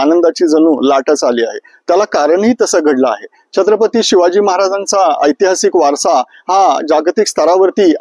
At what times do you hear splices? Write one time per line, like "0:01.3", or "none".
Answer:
none